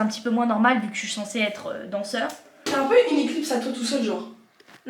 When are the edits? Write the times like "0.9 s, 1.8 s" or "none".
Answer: 2.7 s

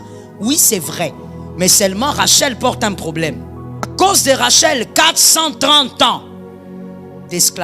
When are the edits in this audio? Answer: 3.9 s

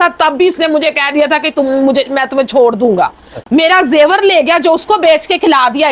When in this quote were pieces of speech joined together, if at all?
3.4 s

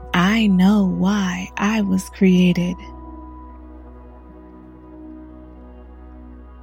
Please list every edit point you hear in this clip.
3.1 s

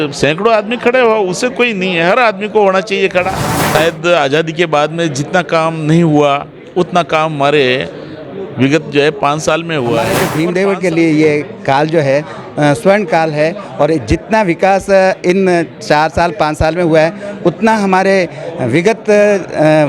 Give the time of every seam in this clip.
3.5 s, 10.3 s

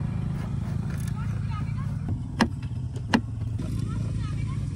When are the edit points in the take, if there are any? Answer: none

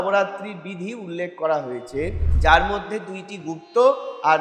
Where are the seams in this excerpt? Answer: none

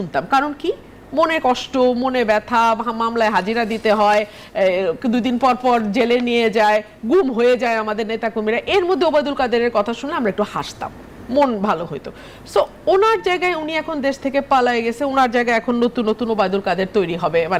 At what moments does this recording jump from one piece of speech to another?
none

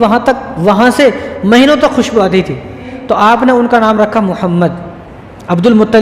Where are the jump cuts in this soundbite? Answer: 2.9 s

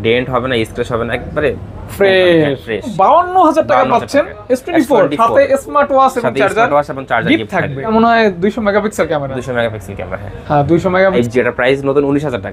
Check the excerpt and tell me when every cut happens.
2.9 s, 7.9 s, 11.0 s

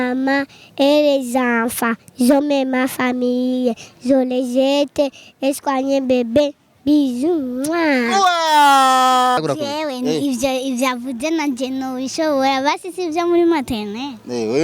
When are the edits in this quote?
9.4 s

